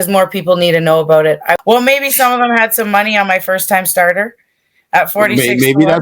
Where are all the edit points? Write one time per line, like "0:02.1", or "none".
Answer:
0:01.5